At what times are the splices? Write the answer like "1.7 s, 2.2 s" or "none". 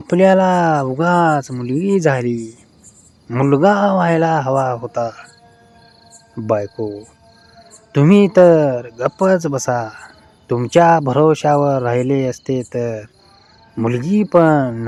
none